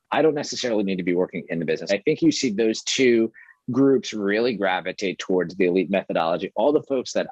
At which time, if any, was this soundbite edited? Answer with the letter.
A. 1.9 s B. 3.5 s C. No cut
A